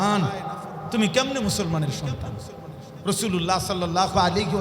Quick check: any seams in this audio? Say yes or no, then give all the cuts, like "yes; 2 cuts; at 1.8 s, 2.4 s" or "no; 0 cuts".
yes; 1 cut; at 2.9 s